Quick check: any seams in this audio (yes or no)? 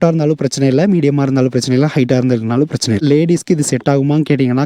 yes